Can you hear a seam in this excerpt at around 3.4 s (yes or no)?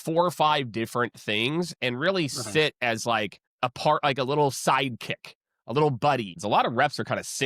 no